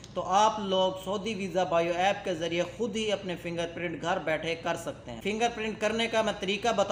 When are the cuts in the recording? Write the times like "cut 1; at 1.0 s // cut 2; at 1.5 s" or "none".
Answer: none